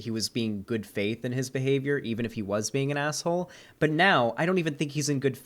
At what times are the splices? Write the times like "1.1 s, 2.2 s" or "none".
none